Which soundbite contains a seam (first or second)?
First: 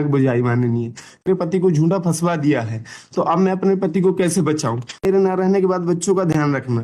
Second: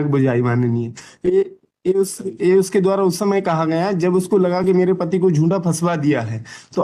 first